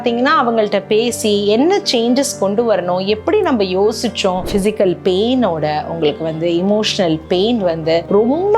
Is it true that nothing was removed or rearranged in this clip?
no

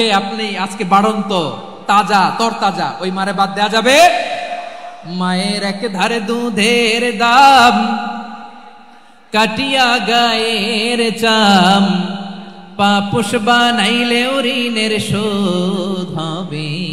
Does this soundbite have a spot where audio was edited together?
no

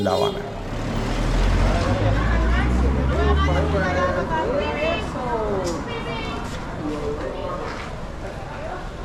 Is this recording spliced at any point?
no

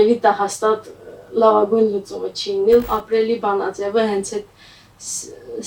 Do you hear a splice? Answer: yes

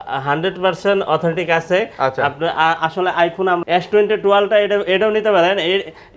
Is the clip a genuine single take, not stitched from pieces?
no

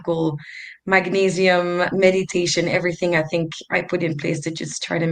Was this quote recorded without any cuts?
no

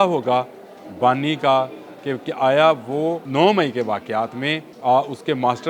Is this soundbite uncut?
no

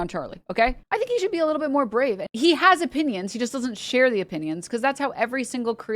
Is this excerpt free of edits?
no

